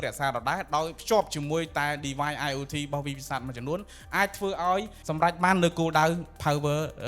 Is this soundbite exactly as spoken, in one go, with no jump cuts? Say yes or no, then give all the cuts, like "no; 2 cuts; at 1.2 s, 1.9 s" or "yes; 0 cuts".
no; 2 cuts; at 1.0 s, 5.0 s